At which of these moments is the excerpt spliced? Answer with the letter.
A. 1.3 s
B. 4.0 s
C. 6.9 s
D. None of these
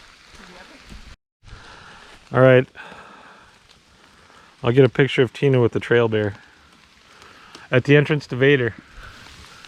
A